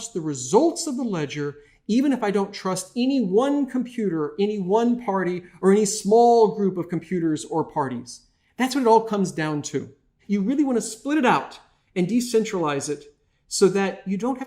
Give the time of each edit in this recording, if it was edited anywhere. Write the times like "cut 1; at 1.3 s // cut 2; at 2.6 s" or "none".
cut 1; at 10.1 s